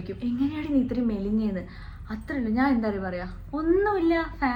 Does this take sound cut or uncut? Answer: uncut